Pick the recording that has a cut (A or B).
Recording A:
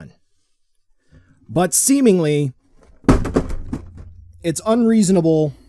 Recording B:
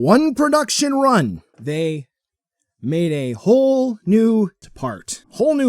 B